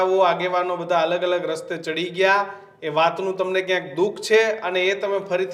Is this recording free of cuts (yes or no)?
yes